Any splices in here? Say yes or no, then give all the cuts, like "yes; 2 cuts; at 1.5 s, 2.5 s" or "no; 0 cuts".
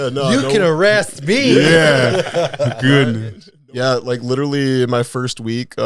yes; 1 cut; at 3.5 s